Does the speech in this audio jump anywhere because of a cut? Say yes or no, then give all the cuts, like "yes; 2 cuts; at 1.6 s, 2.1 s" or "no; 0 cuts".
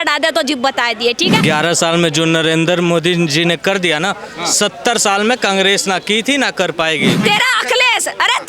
yes; 2 cuts; at 1.4 s, 7.2 s